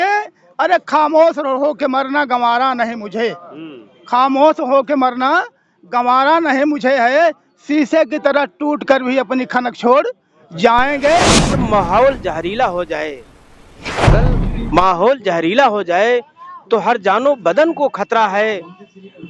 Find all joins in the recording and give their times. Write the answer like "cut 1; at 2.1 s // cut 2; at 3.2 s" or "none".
cut 1; at 11.5 s